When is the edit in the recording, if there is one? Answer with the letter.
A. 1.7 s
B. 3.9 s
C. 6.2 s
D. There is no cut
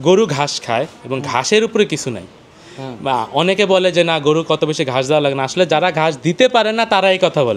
D